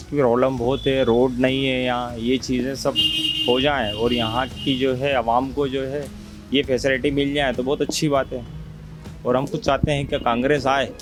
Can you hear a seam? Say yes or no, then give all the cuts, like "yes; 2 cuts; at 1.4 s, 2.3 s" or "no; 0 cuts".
no; 0 cuts